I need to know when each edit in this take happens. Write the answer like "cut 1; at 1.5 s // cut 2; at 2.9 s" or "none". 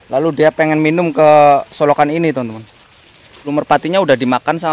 cut 1; at 3.5 s